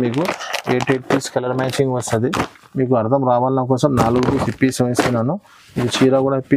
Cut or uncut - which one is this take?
uncut